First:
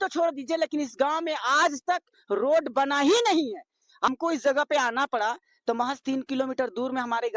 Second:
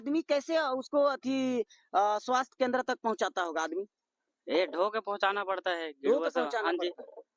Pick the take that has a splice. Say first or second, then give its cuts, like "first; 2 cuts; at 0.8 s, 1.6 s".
first; 1 cut; at 4.1 s